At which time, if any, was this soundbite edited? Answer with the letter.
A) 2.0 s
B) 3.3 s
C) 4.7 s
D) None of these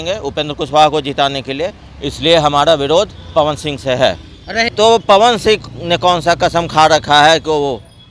C